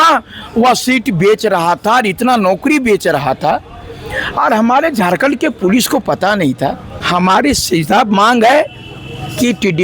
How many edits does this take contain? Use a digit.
1